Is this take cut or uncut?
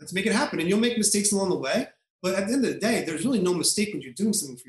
uncut